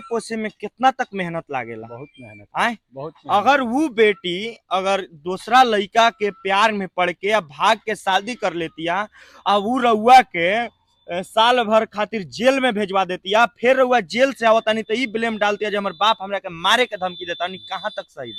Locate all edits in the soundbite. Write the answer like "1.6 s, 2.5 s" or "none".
none